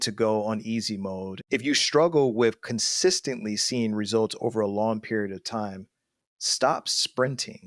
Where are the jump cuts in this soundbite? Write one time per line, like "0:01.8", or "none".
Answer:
0:01.3

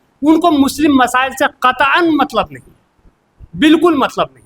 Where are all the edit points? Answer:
none

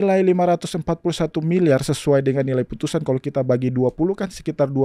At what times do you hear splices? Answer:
none

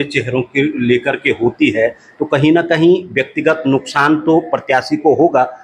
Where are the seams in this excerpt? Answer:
none

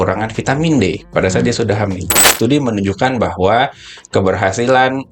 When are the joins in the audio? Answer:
0:02.3

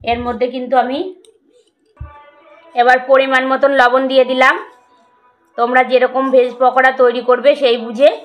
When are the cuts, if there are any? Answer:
none

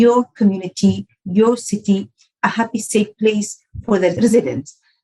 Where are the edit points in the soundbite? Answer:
none

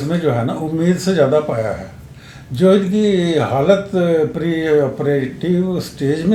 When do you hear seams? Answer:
none

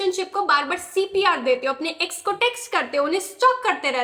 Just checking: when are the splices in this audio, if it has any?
none

